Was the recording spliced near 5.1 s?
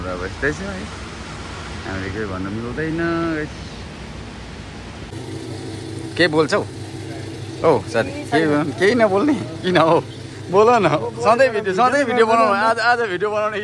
yes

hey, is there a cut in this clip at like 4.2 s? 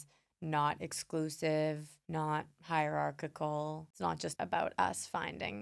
yes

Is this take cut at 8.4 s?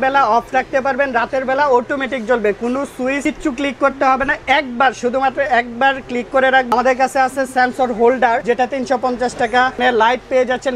yes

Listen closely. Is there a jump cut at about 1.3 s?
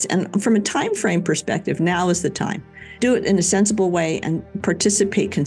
no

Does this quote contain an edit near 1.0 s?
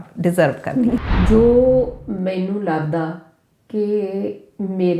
yes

